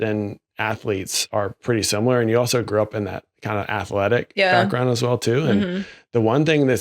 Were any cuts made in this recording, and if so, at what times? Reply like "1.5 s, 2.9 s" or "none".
1.6 s